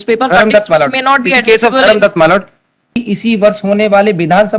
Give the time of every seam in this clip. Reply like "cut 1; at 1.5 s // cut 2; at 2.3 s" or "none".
cut 1; at 3.0 s